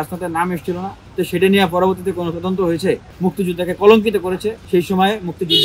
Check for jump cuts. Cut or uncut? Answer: cut